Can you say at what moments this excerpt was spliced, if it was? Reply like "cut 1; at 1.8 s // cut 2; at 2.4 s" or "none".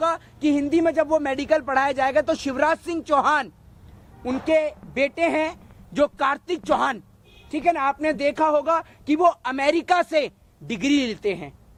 none